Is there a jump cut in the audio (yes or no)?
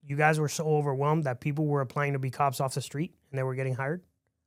no